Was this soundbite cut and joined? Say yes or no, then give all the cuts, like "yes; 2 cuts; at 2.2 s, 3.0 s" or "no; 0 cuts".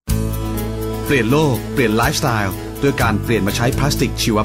no; 0 cuts